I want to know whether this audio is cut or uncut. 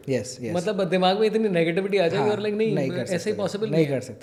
uncut